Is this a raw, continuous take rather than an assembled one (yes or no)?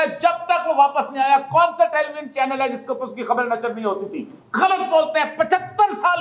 no